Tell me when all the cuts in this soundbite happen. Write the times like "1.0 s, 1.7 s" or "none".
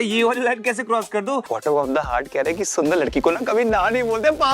1.5 s